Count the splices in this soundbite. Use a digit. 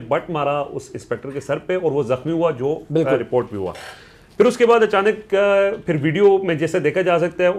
0